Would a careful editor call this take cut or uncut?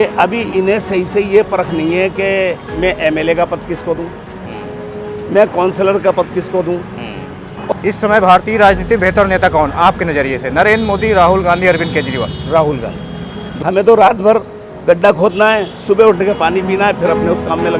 cut